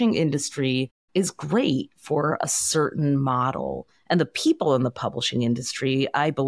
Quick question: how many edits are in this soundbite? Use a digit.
1